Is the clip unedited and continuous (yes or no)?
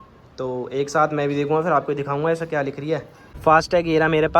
no